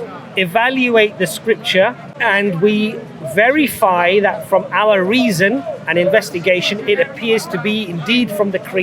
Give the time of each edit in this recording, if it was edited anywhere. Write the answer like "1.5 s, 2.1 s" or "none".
2.1 s